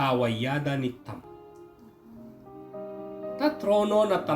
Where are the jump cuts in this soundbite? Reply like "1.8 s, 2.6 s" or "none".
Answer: 1.2 s, 3.4 s